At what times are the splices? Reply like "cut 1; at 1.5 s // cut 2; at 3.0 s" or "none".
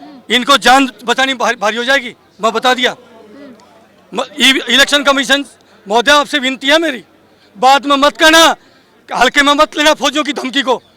none